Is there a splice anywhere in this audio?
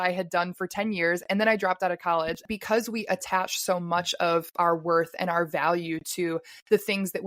yes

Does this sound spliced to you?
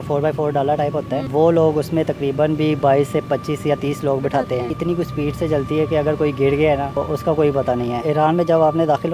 yes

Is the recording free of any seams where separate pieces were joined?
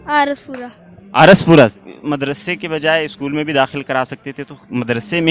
yes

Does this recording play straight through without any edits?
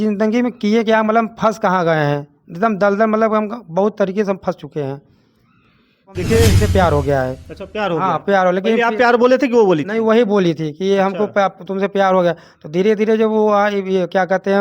no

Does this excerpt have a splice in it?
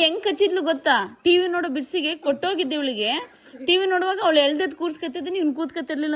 no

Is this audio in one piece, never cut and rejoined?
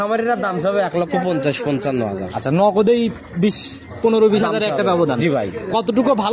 yes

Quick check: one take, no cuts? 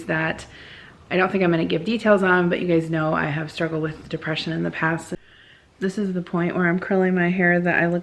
no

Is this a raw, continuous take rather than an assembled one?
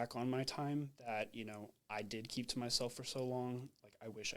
yes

